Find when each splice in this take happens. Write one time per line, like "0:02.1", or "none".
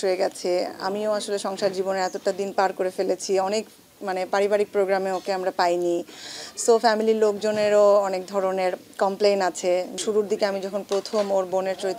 0:10.0

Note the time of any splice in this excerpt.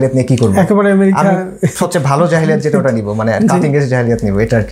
none

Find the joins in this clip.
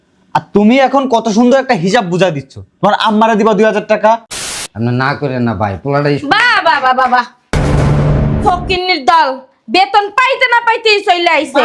0:04.2

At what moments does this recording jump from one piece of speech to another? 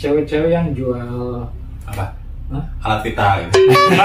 none

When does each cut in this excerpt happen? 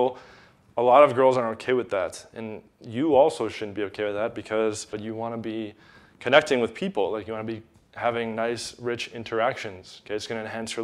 0:04.9

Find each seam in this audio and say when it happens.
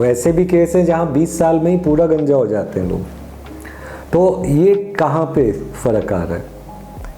none

